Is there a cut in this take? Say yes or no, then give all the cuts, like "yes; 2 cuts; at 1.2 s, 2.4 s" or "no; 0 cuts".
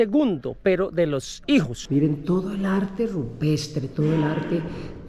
yes; 1 cut; at 1.8 s